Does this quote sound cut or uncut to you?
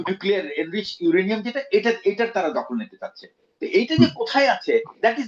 uncut